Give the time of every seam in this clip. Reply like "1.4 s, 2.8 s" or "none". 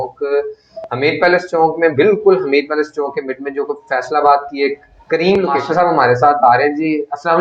5.6 s